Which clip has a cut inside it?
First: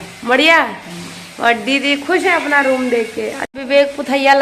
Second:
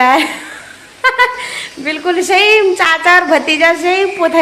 first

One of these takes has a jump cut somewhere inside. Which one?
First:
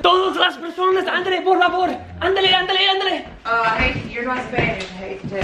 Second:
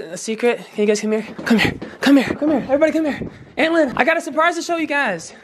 second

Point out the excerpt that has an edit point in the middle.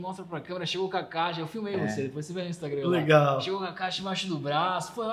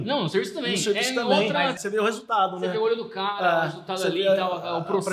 second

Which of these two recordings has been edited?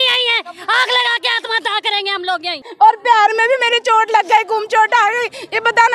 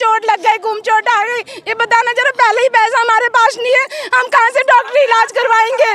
first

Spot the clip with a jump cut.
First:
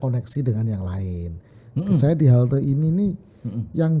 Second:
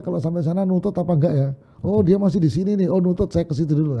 first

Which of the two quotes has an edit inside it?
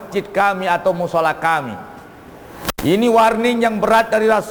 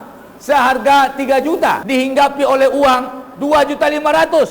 second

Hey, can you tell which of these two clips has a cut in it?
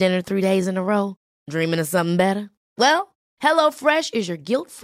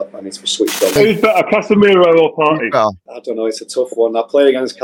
second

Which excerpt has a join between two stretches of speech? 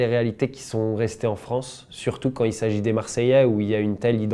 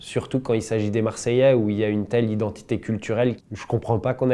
second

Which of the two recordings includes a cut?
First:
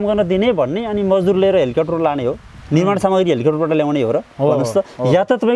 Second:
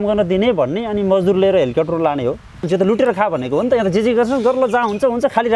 second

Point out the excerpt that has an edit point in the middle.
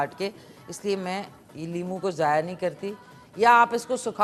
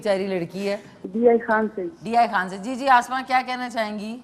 second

